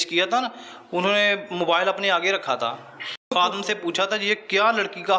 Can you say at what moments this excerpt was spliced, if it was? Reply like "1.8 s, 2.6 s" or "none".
3.3 s